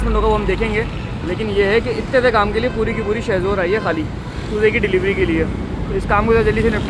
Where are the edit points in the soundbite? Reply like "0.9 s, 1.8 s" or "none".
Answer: none